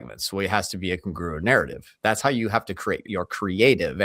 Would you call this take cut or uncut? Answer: cut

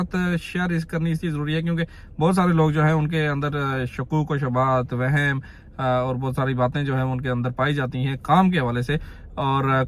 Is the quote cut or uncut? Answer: uncut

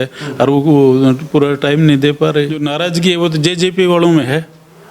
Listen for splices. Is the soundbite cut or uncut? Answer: cut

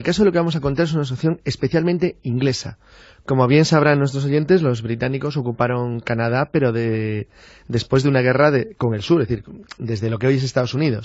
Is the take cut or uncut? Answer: uncut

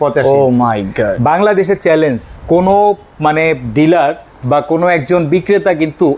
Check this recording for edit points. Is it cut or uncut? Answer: cut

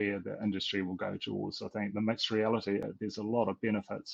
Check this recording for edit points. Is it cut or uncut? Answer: cut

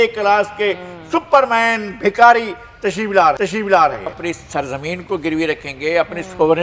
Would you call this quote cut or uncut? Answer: cut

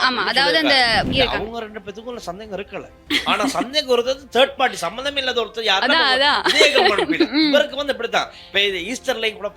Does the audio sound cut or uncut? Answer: cut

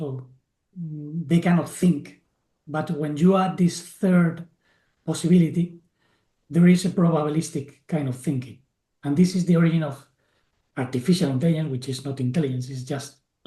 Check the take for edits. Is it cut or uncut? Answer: uncut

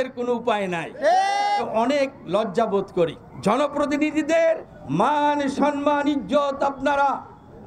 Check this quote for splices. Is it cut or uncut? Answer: cut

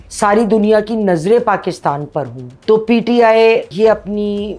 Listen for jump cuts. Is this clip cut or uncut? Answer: uncut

